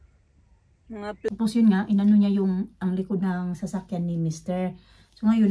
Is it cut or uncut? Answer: cut